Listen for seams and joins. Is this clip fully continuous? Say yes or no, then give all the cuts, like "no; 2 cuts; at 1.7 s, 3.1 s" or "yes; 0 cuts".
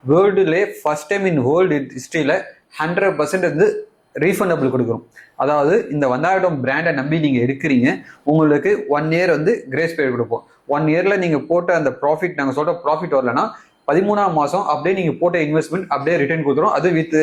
yes; 0 cuts